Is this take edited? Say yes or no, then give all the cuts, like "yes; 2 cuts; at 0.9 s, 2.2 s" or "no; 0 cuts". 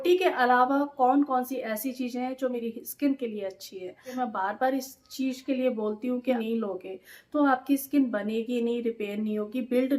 yes; 3 cuts; at 2.6 s, 4.2 s, 6.4 s